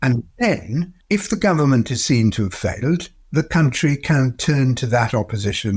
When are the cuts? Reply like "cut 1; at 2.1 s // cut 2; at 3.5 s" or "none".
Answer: cut 1; at 1.0 s